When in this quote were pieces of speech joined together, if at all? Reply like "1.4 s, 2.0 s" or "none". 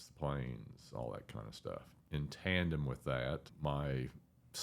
1.9 s, 3.5 s